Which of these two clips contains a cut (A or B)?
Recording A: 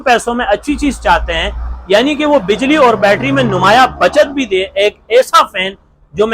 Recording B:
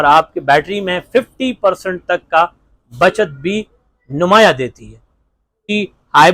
B